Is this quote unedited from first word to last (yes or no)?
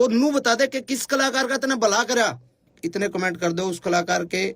no